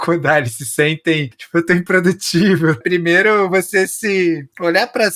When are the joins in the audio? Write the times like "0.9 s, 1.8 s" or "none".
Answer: 2.8 s